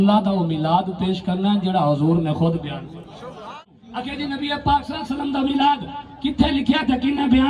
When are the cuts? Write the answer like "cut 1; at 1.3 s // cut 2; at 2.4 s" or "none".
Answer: cut 1; at 3.6 s